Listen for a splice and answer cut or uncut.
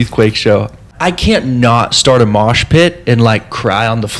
cut